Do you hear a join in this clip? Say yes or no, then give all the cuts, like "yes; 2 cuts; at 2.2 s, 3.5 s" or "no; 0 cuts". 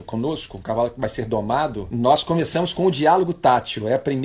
yes; 1 cut; at 1.8 s